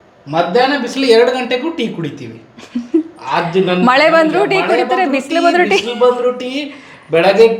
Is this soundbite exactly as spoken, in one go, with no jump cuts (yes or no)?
yes